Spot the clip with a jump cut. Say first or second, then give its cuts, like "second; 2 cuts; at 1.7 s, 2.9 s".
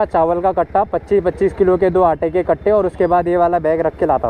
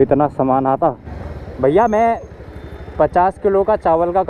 second; 1 cut; at 1.0 s